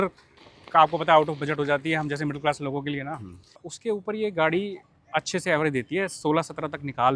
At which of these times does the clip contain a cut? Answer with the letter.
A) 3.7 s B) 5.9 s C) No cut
A